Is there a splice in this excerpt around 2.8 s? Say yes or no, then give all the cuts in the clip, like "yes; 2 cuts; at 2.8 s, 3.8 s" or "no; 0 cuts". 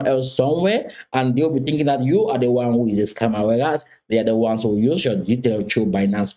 no; 0 cuts